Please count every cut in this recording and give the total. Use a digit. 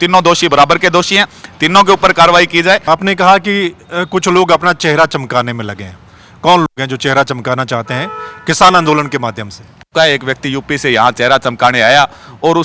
2